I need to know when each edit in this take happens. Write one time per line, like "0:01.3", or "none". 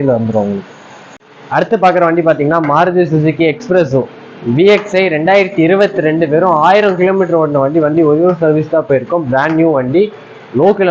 0:01.0